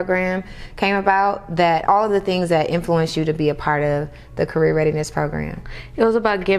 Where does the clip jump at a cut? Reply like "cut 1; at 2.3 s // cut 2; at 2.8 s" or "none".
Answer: cut 1; at 1.8 s